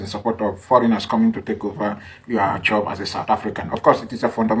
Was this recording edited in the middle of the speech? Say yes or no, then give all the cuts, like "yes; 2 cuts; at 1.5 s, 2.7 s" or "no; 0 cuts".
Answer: no; 0 cuts